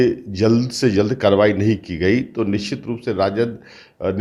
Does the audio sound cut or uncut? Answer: uncut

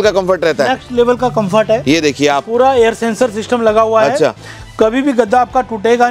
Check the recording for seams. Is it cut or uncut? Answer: uncut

